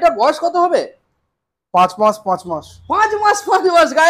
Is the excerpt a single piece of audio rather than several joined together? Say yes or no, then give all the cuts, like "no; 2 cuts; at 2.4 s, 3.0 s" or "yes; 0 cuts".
yes; 0 cuts